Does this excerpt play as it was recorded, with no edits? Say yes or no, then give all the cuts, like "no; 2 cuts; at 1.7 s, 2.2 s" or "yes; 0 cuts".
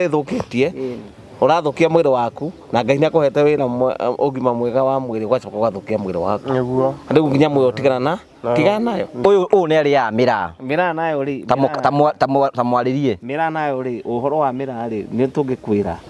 no; 1 cut; at 9.2 s